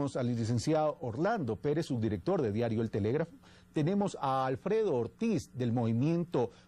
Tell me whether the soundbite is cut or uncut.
cut